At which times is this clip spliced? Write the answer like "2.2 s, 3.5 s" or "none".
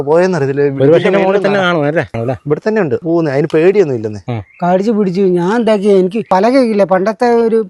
2.2 s, 3.0 s, 4.3 s, 6.2 s